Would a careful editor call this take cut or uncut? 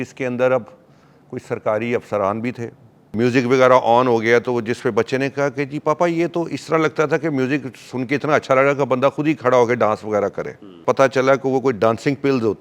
cut